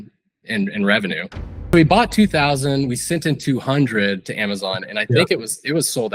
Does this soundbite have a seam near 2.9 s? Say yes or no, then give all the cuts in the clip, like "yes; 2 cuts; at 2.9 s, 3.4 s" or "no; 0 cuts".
no; 1 cut; at 1.5 s